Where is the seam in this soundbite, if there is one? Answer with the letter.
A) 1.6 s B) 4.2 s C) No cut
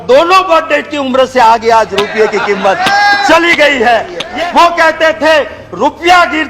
B